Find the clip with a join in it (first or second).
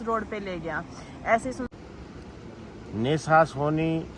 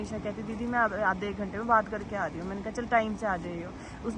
first